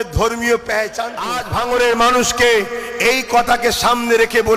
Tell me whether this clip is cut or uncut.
cut